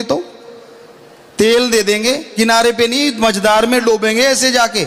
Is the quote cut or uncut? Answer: uncut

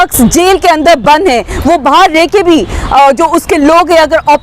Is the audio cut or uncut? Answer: uncut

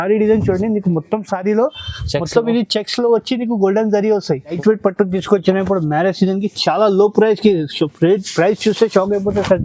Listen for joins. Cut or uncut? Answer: cut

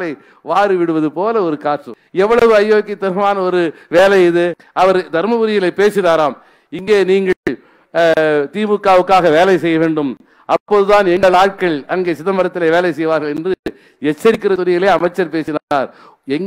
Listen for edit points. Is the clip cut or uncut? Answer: cut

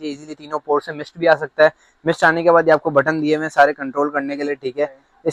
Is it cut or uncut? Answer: uncut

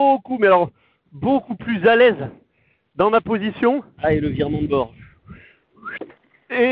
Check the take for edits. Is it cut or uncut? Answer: cut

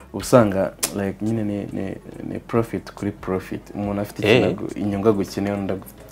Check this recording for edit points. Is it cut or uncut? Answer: uncut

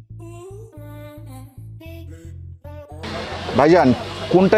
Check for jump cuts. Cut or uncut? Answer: uncut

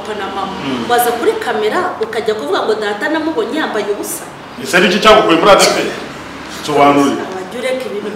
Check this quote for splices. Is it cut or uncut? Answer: cut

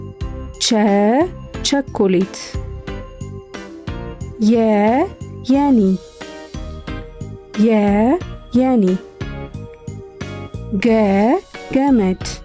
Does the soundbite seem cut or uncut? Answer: cut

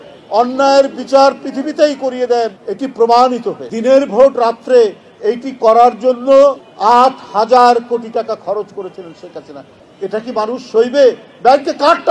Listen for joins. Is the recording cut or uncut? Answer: cut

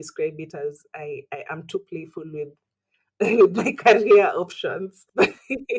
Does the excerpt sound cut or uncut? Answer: cut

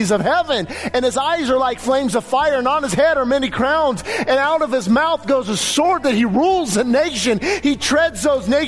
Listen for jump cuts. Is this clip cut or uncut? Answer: uncut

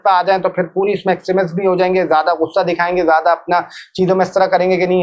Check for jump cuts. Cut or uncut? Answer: uncut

